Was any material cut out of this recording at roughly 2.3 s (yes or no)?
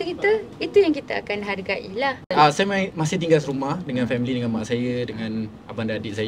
yes